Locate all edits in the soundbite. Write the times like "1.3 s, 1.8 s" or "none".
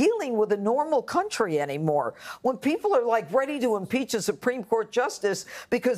2.6 s

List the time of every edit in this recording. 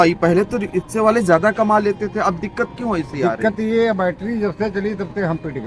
none

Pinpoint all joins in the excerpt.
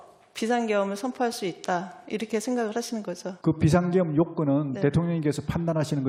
none

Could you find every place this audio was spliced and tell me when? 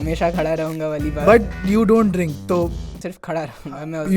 2.9 s

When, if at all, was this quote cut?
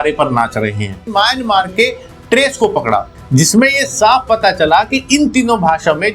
1.1 s

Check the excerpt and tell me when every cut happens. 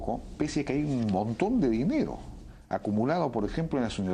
0.9 s

